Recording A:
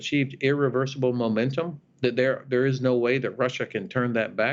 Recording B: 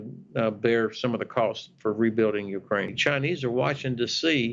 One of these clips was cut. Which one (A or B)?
B